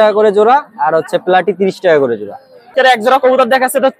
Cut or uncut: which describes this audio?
cut